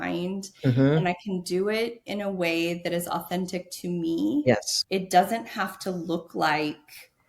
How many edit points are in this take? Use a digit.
1